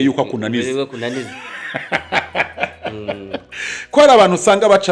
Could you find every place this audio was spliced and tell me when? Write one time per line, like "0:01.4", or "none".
none